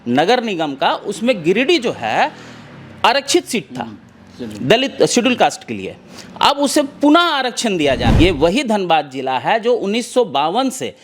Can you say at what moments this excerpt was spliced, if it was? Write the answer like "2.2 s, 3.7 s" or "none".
8.1 s